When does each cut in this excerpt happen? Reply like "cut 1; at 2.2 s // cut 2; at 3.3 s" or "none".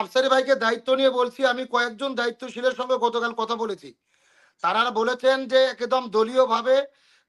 none